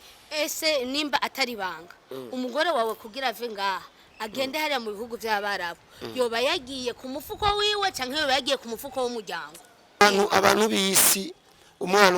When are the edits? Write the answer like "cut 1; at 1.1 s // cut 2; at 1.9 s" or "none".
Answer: cut 1; at 10.0 s